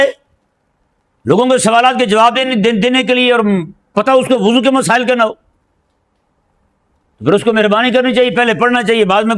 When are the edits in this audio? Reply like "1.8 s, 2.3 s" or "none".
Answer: none